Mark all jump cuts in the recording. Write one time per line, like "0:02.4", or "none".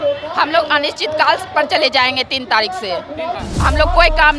0:03.4